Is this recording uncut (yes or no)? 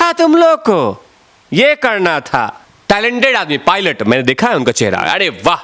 no